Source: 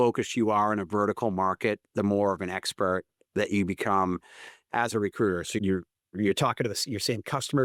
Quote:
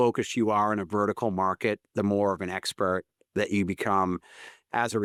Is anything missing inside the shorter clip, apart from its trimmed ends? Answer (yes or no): no